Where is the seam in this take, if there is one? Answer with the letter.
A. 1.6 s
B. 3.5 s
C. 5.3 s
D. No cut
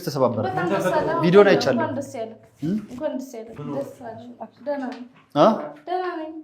B